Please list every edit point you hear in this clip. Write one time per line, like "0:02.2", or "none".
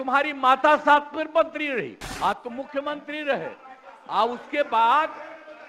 0:02.0